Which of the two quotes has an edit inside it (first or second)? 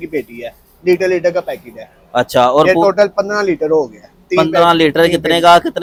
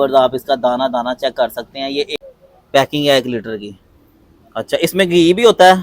second